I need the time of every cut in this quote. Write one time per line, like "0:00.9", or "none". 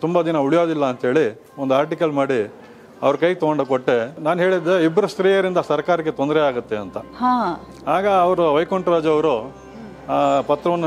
0:04.1